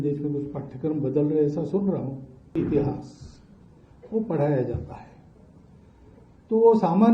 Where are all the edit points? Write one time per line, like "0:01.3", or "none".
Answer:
0:02.6